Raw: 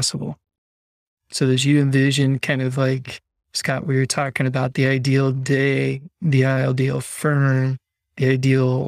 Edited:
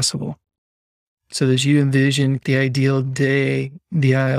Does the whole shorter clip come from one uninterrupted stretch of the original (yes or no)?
no